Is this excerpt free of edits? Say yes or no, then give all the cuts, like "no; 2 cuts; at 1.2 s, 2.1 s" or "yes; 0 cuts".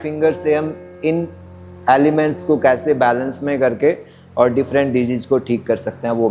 yes; 0 cuts